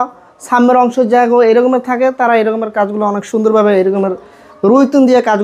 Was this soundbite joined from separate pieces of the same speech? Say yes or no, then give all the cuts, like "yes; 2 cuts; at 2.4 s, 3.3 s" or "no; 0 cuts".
no; 0 cuts